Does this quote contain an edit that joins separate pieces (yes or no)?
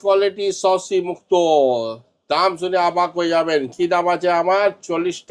no